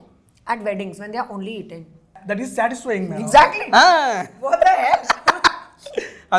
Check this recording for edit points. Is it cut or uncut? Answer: cut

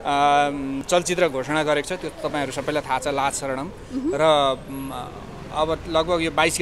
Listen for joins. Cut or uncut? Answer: uncut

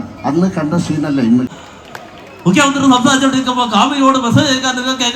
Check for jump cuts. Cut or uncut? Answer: cut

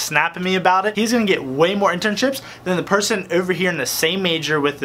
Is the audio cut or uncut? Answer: cut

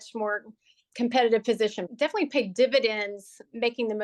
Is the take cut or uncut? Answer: cut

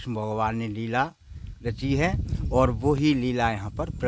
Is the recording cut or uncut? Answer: uncut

